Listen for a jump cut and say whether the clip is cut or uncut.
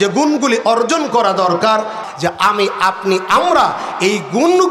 cut